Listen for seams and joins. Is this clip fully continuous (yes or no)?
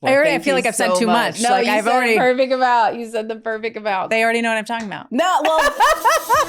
no